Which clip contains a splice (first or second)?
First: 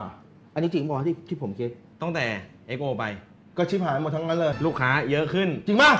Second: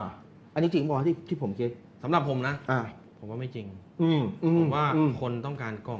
first